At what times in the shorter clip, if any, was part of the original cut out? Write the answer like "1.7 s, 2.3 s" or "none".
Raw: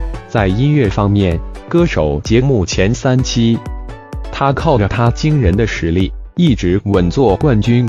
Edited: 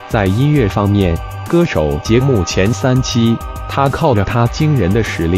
3.6 s